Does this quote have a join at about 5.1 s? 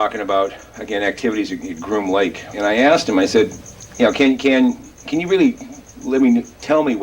no; 1 cut; at 2.7 s

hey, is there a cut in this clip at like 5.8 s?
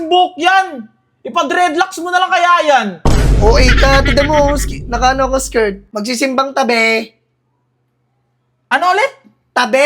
yes; 1 cut; at 5.8 s

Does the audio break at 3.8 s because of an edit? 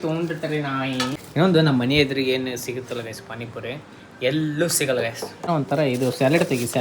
no; 2 cuts; at 1.1 s, 5.5 s

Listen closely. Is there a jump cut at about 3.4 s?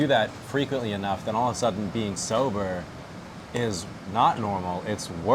no; 0 cuts

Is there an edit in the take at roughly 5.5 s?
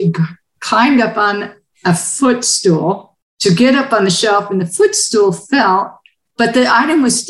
no; 1 cut; at 3.1 s

